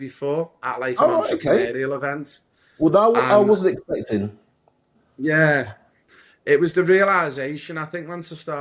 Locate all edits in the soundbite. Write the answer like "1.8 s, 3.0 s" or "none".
5.0 s